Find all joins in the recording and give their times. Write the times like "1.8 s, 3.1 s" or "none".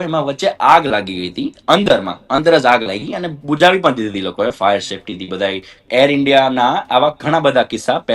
5.9 s